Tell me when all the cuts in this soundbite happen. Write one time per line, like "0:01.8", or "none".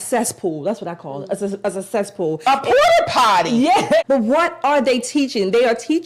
0:03.8